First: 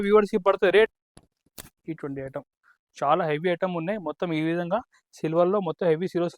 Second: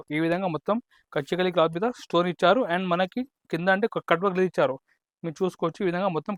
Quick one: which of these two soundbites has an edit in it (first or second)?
first